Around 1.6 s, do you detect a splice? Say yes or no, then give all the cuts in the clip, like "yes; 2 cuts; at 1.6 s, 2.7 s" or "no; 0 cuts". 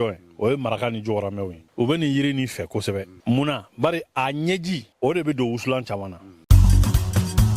yes; 4 cuts; at 1.6 s, 3.1 s, 4.9 s, 6.3 s